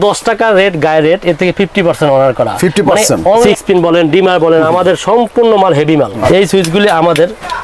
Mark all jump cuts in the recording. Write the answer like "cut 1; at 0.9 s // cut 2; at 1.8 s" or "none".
cut 1; at 3.5 s // cut 2; at 6.2 s